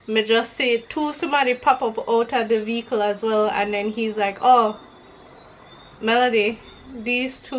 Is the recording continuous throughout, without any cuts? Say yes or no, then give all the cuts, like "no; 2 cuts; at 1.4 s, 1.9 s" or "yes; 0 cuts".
yes; 0 cuts